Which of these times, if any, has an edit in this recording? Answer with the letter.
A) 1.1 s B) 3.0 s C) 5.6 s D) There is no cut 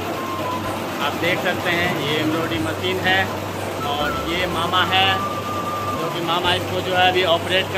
D